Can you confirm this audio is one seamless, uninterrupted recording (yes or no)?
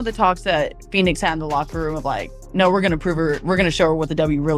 yes